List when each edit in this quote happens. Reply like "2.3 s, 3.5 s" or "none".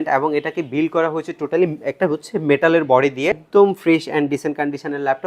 3.4 s